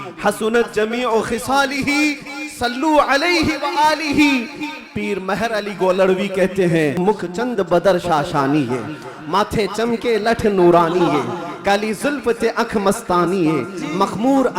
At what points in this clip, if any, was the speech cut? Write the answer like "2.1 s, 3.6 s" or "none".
7.0 s